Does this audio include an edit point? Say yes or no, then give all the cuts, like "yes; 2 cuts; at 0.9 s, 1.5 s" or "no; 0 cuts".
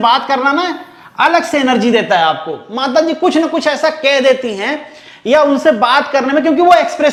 no; 0 cuts